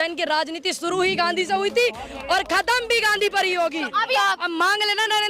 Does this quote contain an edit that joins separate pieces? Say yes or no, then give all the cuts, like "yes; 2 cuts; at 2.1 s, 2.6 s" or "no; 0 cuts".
yes; 1 cut; at 4.2 s